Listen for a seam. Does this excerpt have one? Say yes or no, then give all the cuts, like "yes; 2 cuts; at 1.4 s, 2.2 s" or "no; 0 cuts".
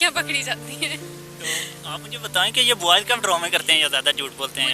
no; 0 cuts